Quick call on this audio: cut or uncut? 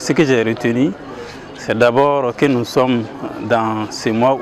uncut